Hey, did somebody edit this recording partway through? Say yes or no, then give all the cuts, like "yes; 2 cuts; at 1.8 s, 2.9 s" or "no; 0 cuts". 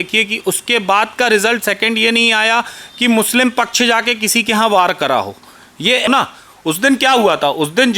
yes; 1 cut; at 6.1 s